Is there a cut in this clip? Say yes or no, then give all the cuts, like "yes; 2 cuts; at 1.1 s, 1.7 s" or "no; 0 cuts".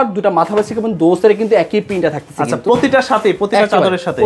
no; 0 cuts